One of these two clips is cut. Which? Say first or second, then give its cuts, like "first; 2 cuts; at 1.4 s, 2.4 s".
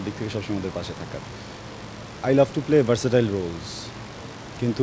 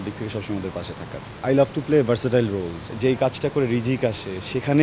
second; 2 cuts; at 1.3 s, 2.9 s